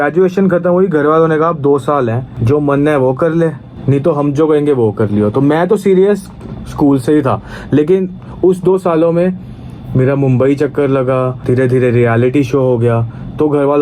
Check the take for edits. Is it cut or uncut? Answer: cut